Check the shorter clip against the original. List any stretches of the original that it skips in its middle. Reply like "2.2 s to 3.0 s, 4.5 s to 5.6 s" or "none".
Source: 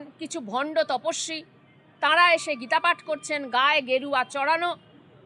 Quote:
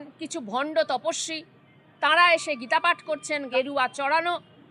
3.5 s to 3.9 s